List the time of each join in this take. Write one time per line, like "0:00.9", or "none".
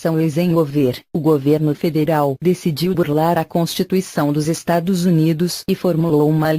0:04.1